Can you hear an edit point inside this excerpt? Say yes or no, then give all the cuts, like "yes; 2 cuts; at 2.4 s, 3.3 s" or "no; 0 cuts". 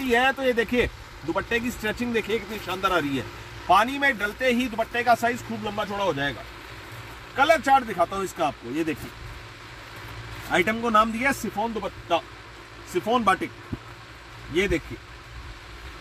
no; 0 cuts